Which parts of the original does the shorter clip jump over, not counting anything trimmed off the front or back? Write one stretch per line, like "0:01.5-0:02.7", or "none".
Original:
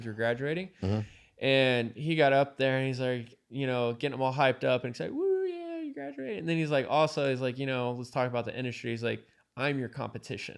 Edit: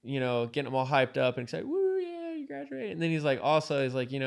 none